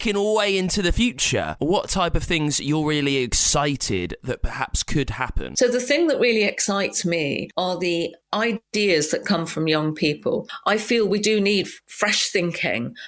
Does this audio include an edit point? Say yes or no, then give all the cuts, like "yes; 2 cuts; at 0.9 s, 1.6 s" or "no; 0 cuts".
yes; 3 cuts; at 1.5 s, 5.4 s, 10.5 s